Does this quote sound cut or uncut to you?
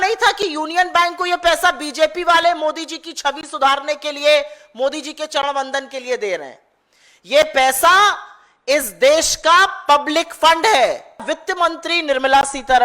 cut